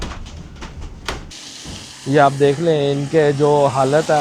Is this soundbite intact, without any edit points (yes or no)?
no